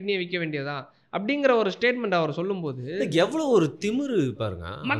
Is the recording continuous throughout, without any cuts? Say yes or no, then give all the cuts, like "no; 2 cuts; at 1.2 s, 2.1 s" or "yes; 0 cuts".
yes; 0 cuts